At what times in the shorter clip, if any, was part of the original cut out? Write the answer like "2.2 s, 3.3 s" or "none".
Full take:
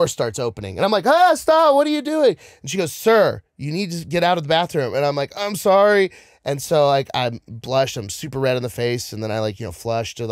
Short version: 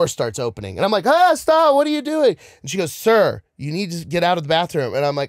none